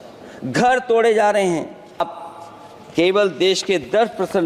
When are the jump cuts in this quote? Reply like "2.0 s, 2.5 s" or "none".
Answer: 2.0 s